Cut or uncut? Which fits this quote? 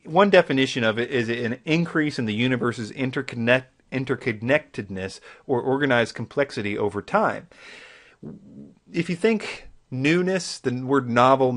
cut